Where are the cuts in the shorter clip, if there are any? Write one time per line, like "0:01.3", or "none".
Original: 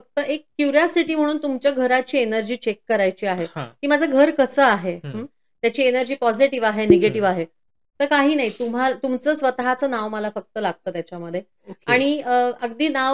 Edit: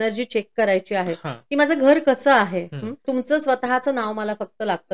0:03.0